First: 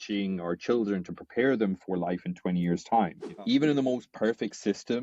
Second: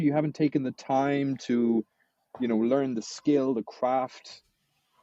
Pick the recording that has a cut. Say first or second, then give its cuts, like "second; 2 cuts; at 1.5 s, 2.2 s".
first; 1 cut; at 3.3 s